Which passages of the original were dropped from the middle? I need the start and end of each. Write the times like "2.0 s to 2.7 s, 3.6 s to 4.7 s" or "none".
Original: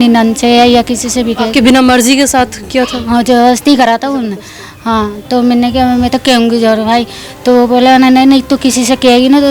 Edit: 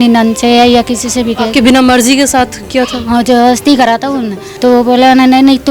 4.4 s to 7.2 s